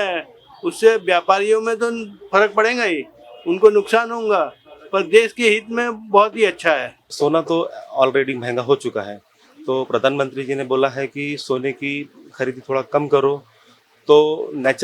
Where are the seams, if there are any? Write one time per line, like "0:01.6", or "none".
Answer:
0:07.0